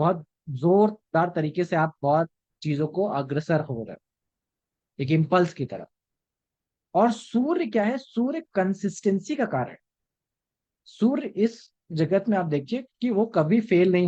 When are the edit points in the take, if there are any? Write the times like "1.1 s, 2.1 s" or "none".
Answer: none